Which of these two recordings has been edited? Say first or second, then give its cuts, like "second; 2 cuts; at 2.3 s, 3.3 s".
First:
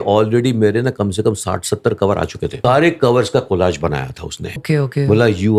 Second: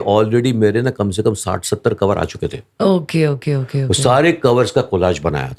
first; 2 cuts; at 2.6 s, 4.6 s